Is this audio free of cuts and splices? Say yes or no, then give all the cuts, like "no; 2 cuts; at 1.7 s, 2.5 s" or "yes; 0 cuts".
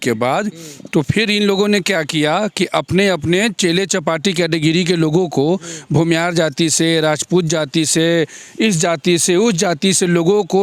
yes; 0 cuts